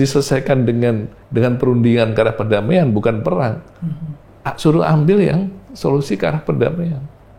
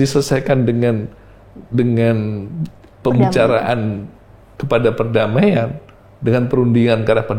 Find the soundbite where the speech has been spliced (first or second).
first